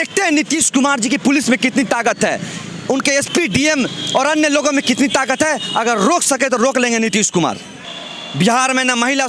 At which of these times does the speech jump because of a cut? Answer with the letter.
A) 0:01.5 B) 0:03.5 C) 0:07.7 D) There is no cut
C